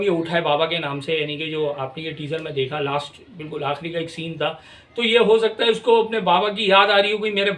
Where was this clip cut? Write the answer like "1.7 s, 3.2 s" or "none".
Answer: none